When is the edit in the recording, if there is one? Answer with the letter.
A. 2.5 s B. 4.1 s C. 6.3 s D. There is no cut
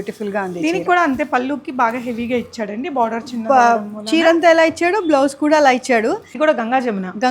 C